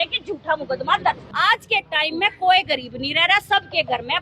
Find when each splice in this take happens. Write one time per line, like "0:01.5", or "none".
0:01.3